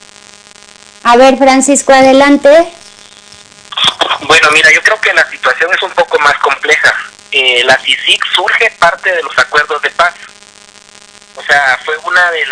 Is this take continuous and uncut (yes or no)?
no